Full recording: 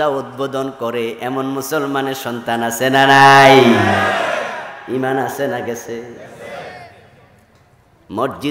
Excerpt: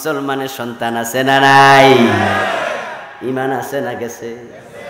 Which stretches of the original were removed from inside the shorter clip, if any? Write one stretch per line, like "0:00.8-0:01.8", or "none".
none